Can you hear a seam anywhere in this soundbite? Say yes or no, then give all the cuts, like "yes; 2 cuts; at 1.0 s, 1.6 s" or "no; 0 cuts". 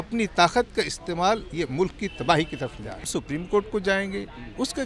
yes; 1 cut; at 3.1 s